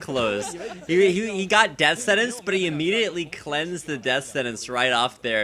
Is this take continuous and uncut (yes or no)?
yes